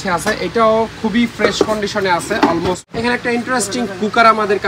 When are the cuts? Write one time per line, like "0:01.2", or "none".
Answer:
0:02.9